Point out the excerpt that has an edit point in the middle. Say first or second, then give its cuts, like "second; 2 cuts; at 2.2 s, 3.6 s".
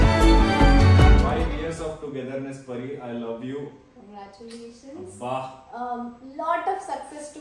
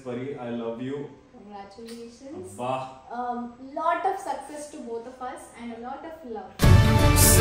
first; 1 cut; at 1.2 s